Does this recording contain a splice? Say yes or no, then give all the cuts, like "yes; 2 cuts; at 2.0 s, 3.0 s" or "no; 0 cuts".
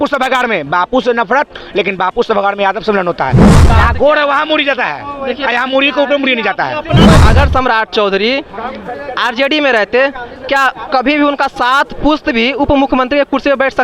yes; 2 cuts; at 3.5 s, 7.2 s